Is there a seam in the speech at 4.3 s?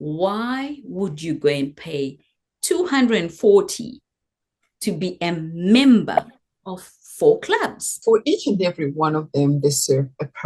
no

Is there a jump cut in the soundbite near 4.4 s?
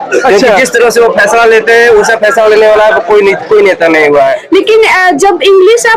yes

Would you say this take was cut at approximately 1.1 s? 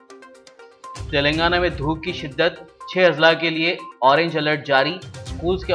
yes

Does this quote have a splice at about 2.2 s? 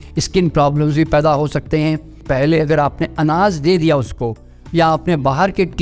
yes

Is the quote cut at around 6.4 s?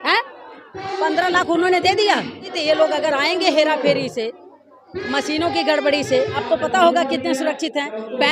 yes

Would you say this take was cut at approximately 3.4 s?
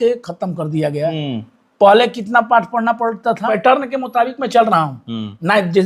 yes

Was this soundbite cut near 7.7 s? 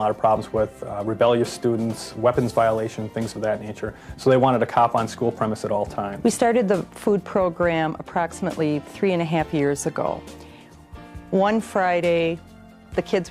no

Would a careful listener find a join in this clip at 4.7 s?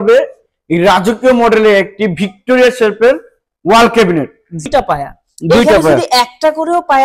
yes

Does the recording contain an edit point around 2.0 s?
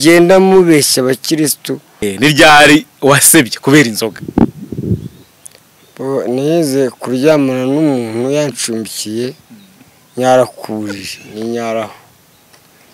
yes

